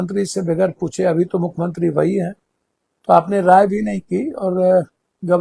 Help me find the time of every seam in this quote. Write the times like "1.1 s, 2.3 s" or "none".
none